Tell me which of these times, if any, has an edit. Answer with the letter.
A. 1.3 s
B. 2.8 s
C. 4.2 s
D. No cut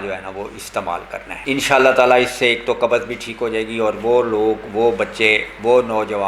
A